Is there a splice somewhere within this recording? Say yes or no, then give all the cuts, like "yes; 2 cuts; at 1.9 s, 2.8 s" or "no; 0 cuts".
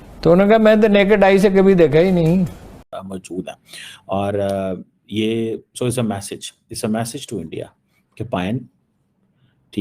yes; 1 cut; at 3.0 s